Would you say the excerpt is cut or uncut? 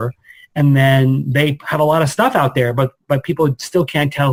uncut